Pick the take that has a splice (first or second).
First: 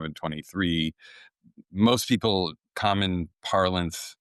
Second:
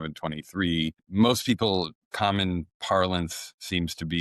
second